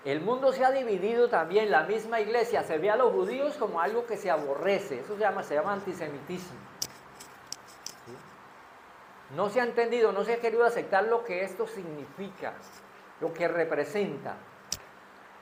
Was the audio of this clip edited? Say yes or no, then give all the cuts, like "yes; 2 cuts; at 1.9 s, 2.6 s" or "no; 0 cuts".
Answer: no; 0 cuts